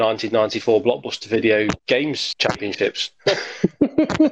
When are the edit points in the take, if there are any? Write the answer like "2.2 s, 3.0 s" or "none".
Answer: 2.0 s, 3.1 s